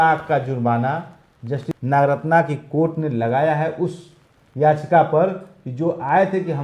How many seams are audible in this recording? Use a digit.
1